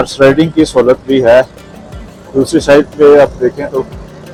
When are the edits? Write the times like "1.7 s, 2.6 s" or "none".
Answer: none